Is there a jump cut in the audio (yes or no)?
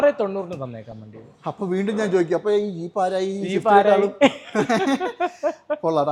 no